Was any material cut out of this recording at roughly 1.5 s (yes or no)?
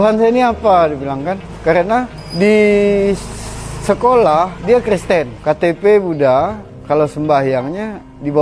yes